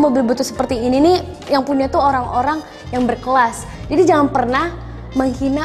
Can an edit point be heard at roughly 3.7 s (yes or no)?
yes